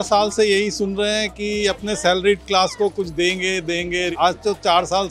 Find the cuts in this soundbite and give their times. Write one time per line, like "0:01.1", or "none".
0:04.1

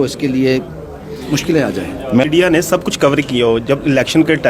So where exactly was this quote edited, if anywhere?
0:02.2

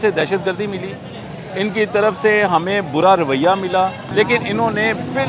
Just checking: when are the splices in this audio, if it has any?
0:04.0

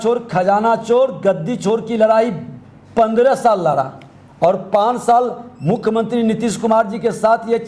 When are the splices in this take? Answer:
none

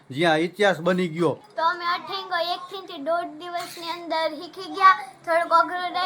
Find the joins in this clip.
0:01.5

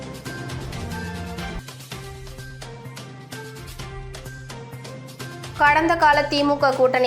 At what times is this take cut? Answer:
0:01.3

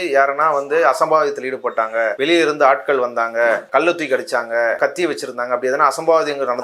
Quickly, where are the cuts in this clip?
0:02.1
0:03.7
0:04.8

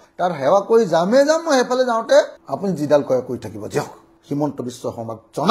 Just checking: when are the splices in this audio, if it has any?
0:02.3
0:04.1

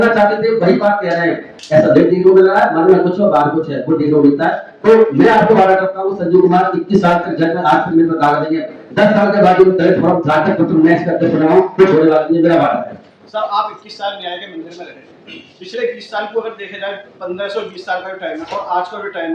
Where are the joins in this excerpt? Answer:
none

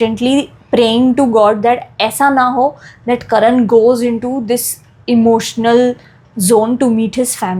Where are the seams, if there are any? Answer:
none

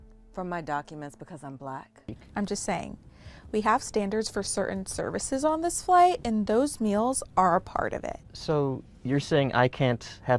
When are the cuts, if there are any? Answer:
0:02.1

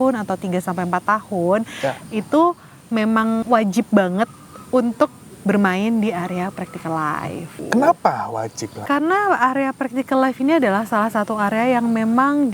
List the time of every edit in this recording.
0:03.4
0:07.6
0:08.8

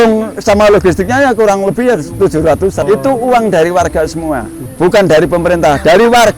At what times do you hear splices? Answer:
0:02.8
0:04.6

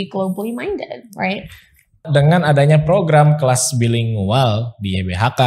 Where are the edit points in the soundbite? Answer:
0:02.0

